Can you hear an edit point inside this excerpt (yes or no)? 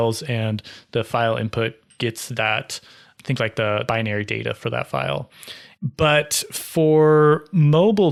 no